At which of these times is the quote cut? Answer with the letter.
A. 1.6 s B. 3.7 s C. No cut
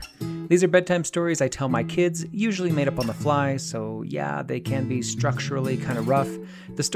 C